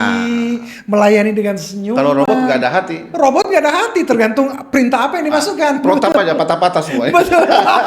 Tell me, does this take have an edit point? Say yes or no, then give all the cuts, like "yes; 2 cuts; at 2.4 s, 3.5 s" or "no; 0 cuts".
no; 0 cuts